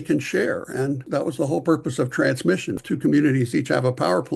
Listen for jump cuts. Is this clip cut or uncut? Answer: cut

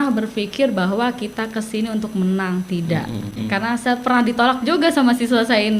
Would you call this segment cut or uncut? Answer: cut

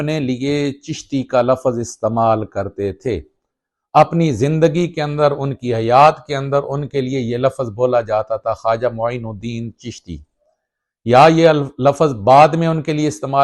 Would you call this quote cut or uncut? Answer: uncut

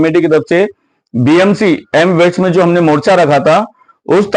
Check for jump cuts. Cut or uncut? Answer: uncut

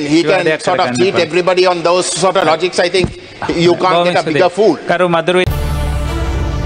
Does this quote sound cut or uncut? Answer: cut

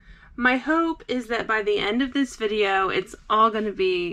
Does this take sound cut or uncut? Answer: uncut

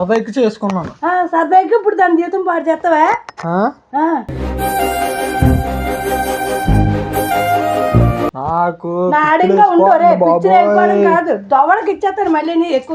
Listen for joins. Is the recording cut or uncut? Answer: uncut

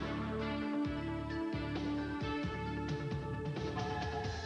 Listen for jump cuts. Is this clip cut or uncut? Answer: cut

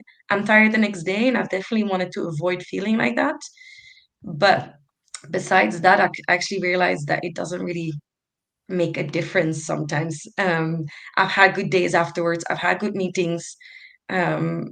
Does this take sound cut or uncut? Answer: uncut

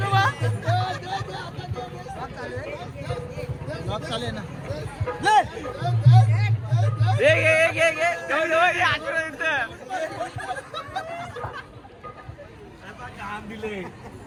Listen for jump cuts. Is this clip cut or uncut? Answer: uncut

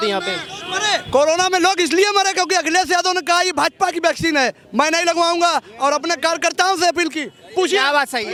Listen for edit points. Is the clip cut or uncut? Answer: uncut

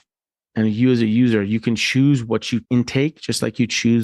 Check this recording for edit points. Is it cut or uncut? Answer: cut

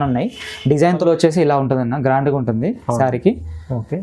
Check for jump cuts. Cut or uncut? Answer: cut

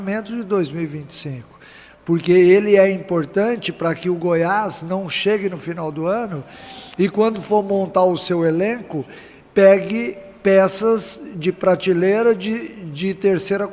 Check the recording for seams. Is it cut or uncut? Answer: uncut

